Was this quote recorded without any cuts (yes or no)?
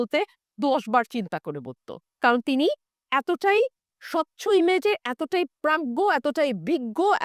yes